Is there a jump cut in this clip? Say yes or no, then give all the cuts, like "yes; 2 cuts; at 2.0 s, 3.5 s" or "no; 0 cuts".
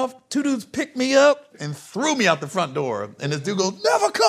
yes; 1 cut; at 1.5 s